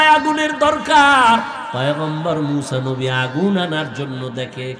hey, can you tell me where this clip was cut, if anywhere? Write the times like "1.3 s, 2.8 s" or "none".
1.6 s